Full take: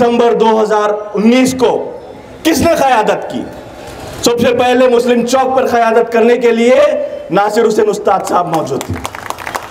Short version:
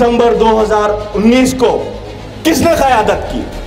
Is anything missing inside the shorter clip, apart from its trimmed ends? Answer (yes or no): no